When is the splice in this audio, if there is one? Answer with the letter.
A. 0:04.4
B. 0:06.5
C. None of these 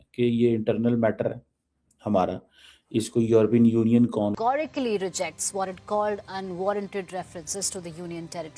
A